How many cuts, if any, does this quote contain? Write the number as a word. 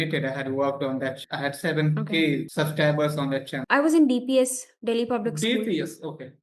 three